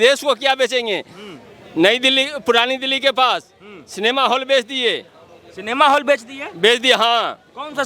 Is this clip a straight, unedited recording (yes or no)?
yes